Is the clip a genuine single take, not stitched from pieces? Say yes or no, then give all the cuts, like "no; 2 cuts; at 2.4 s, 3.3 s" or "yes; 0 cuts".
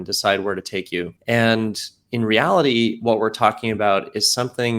no; 1 cut; at 1.1 s